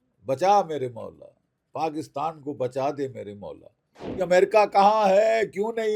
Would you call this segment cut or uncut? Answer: cut